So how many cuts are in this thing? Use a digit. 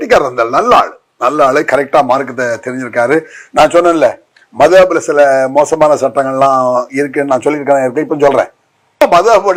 0